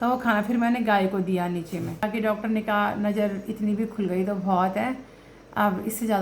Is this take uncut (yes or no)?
no